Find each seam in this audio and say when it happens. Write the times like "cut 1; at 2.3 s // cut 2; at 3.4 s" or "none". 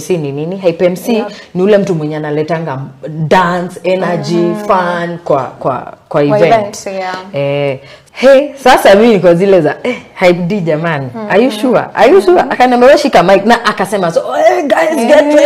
cut 1; at 7.9 s

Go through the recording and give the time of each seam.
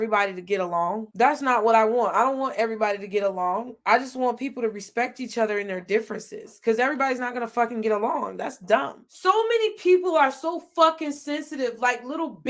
cut 1; at 8.9 s

